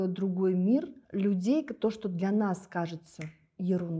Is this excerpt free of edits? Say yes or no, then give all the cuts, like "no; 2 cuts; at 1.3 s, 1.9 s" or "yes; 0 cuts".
no; 1 cut; at 1.0 s